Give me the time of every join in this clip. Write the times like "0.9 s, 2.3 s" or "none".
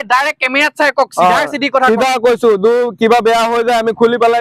none